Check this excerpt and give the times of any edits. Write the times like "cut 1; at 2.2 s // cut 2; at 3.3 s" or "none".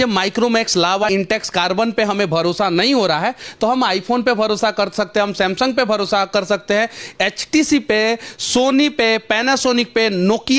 cut 1; at 1.1 s